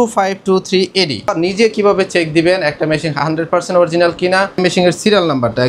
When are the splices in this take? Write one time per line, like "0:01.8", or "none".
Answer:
0:01.3
0:04.6